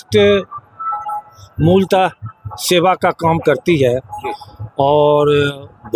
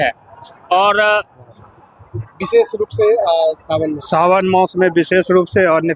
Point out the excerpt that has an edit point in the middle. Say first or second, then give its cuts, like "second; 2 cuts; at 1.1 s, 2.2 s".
second; 1 cut; at 1.5 s